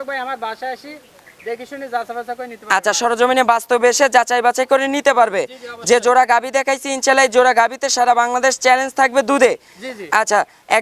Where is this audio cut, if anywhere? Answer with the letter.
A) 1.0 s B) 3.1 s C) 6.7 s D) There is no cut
D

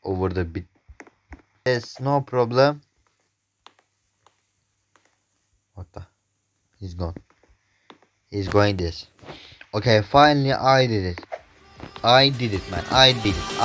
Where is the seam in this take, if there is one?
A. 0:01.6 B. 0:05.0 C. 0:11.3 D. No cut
A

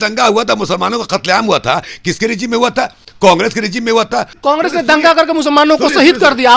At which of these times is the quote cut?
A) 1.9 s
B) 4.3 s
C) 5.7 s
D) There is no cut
B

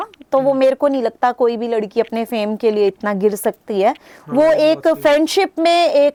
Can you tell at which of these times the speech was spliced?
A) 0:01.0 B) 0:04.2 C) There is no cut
C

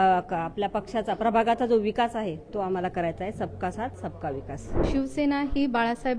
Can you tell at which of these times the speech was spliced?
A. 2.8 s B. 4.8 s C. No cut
B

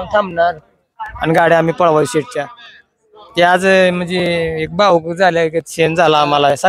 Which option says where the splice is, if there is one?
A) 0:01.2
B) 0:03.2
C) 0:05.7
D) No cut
D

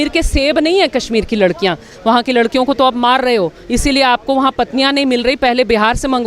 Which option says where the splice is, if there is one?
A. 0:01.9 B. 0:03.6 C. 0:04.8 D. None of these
A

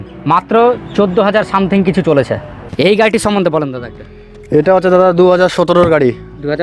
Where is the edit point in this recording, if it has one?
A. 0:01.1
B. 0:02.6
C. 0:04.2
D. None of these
B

